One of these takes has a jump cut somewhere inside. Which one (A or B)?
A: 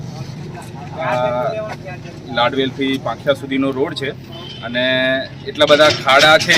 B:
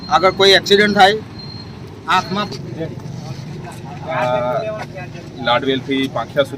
B